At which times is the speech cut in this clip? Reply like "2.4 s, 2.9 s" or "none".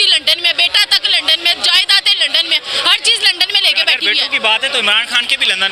none